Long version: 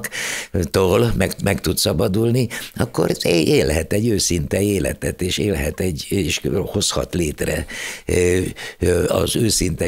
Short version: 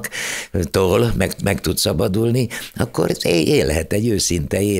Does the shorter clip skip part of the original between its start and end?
no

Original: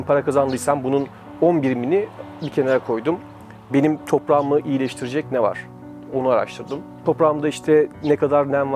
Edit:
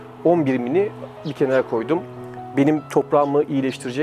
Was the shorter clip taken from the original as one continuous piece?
yes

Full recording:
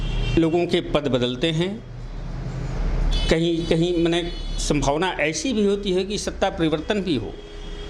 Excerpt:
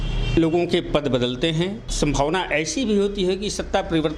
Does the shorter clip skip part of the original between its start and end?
yes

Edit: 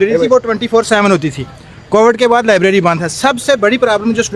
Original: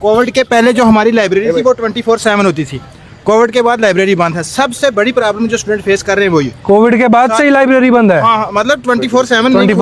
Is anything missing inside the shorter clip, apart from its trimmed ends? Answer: no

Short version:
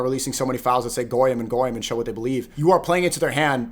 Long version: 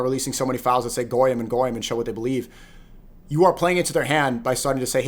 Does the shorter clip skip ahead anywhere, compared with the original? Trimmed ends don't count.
yes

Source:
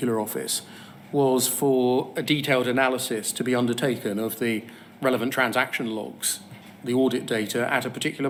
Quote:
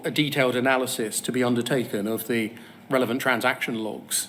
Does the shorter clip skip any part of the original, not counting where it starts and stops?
no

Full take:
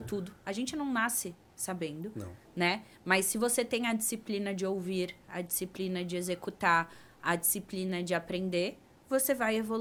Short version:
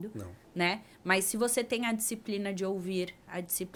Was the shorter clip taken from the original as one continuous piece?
yes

